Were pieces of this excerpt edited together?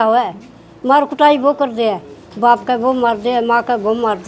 no; 0 cuts

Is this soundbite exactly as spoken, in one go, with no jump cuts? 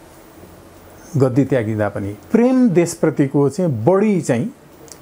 yes; 0 cuts

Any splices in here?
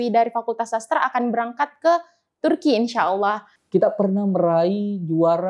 yes; 1 cut; at 3.5 s

